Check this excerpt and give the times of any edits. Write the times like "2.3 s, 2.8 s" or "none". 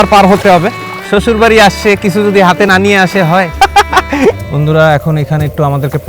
0.9 s, 4.4 s